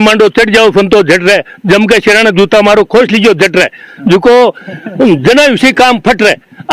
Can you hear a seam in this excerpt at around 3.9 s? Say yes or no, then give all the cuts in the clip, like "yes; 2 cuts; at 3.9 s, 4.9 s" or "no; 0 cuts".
no; 0 cuts